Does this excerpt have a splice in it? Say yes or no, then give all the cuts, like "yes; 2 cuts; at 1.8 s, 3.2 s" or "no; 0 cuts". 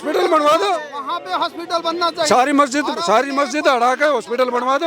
no; 0 cuts